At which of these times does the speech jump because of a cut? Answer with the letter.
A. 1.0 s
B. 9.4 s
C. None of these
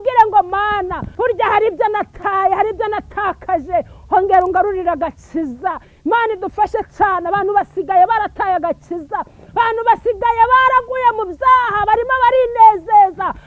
A